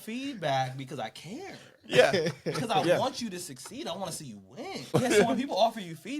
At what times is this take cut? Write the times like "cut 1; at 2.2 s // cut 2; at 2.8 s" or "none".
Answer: cut 1; at 4.9 s